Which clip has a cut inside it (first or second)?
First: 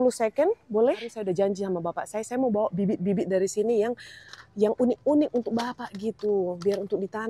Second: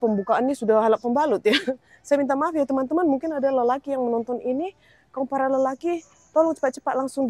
first